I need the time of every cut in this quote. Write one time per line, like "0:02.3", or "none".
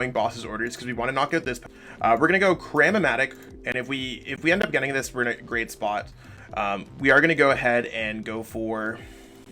0:01.6